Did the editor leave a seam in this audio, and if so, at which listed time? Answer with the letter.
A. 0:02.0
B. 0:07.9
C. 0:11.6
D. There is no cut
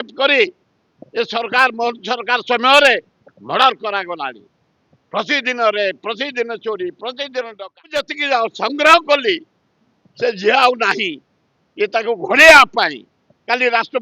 B